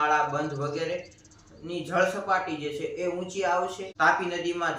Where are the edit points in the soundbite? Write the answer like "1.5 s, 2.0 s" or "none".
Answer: 3.8 s